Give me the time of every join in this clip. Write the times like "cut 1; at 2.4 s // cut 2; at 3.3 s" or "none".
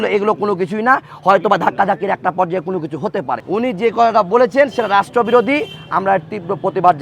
cut 1; at 3.4 s